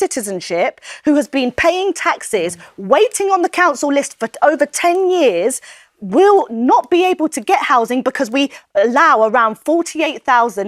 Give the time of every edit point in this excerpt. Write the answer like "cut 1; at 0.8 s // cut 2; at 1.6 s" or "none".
none